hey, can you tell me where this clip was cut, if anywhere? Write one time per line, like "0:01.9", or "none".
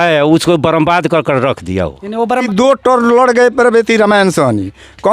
0:02.3